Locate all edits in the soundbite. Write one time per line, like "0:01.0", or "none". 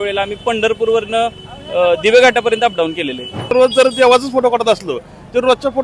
0:03.5